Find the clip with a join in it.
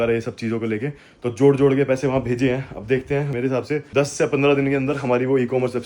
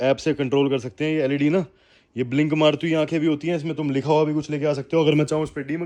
first; 1 cut; at 3.5 s

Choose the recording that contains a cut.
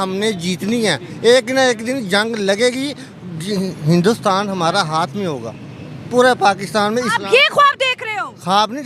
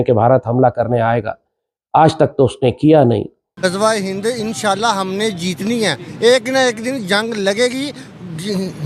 second; 1 cut; at 3.4 s

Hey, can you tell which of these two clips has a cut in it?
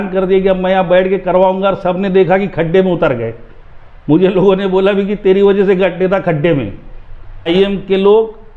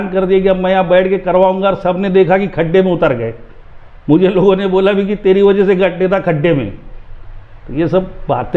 first; 1 cut; at 7.5 s

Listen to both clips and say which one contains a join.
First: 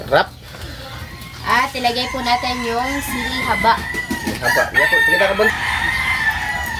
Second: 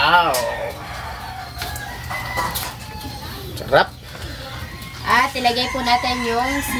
first; 1 cut; at 5.5 s

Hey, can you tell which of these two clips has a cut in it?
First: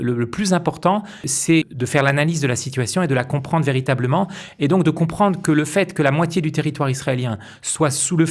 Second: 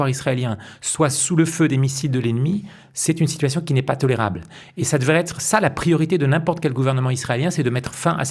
first; 1 cut; at 1.5 s

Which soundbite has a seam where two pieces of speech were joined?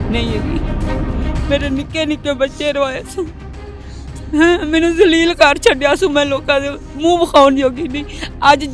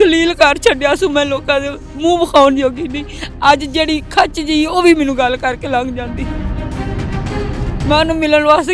second; 2 cuts; at 6.3 s, 7.8 s

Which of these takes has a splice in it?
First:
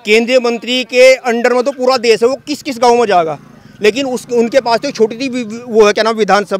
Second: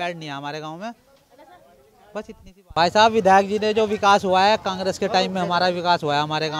second; 1 cut; at 2.5 s

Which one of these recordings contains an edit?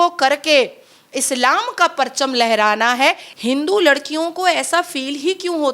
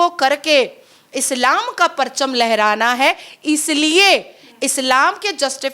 first; 1 cut; at 3.3 s

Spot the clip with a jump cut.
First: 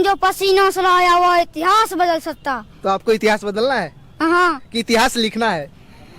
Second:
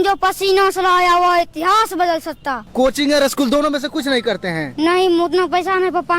second; 1 cut; at 2.6 s

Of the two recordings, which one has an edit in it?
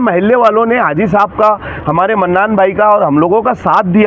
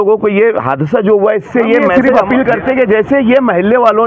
second; 1 cut; at 1.9 s

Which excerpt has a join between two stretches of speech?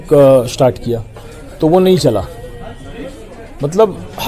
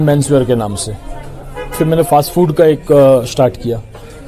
second; 1 cut; at 1.7 s

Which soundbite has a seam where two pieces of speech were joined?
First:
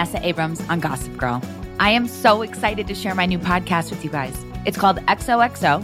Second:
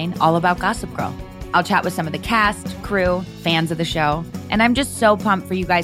first; 1 cut; at 1.6 s

